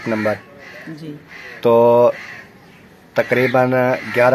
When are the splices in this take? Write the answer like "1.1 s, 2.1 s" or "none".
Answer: none